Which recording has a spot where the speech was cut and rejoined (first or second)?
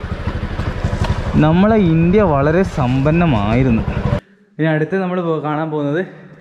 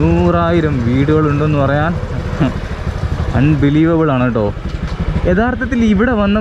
first